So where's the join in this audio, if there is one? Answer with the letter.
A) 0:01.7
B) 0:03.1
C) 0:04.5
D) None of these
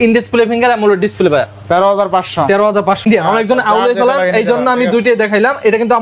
B